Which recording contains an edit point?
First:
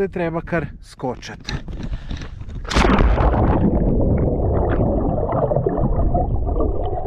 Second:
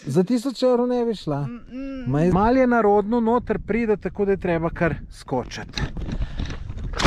second; 1 cut; at 2.3 s

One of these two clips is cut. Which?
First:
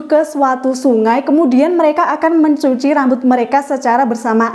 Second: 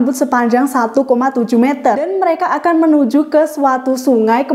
second; 1 cut; at 2.1 s

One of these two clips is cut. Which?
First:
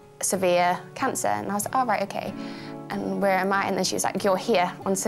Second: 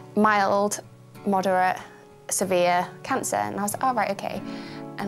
second; 1 cut; at 1.1 s

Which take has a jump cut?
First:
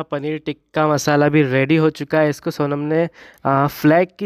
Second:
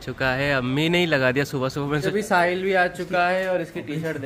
second; 1 cut; at 2.1 s

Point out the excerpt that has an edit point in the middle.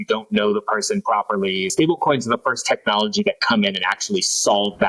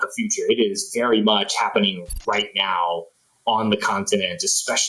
first; 1 cut; at 1.7 s

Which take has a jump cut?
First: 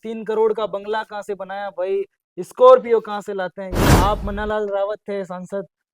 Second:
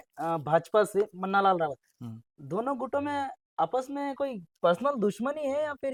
first; 1 cut; at 3.8 s

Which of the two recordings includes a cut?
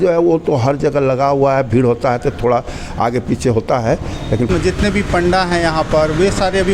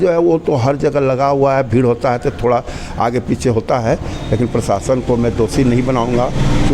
first; 1 cut; at 4.5 s

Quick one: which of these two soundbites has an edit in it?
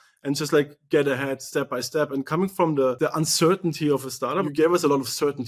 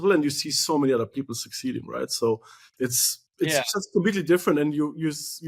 first; 2 cuts; at 3.0 s, 4.4 s

